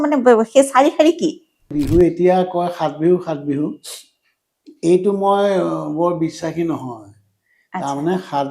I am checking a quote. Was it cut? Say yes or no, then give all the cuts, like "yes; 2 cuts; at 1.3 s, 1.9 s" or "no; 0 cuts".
yes; 1 cut; at 1.6 s